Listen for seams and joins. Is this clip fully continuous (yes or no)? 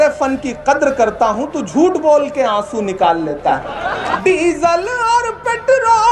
no